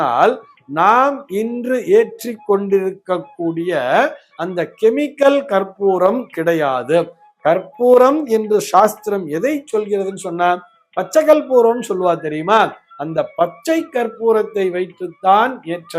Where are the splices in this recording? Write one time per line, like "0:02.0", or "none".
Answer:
none